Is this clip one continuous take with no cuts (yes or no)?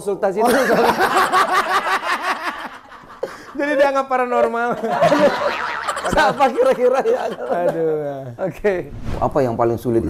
no